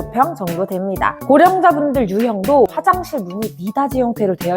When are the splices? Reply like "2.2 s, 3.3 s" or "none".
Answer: 1.2 s, 2.8 s